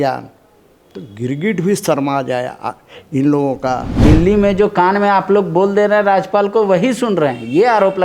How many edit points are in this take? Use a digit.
1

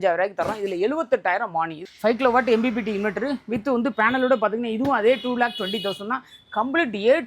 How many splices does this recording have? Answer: 1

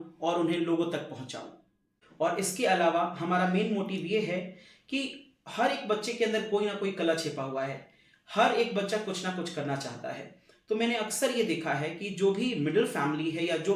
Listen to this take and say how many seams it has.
1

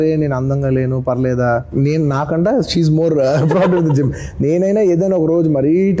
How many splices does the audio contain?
1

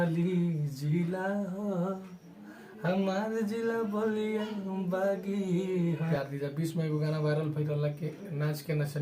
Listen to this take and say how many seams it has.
1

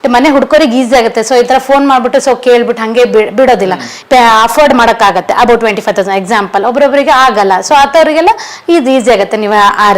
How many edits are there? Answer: 1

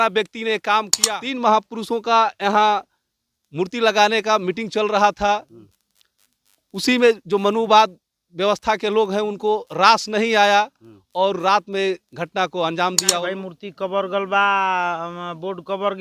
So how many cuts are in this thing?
2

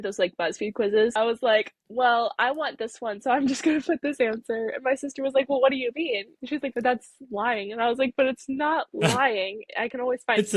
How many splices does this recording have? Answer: 2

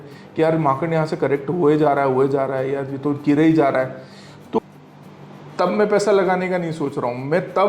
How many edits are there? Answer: 1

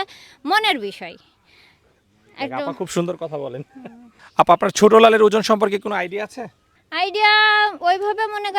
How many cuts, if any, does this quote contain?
0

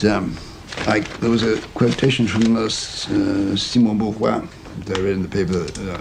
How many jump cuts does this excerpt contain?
0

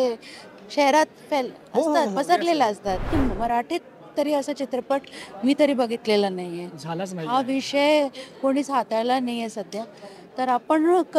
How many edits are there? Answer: 1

